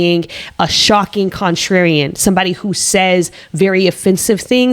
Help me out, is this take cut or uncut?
uncut